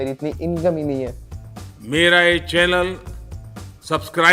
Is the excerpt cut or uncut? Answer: cut